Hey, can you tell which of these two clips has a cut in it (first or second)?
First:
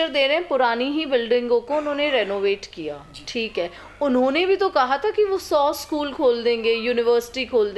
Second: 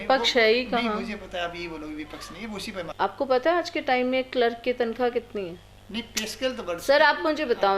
second